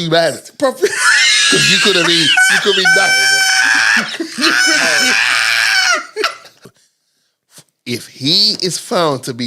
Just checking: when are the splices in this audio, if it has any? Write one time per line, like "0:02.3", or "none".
0:06.7